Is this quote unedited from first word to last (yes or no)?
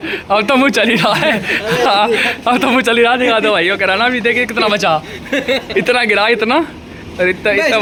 yes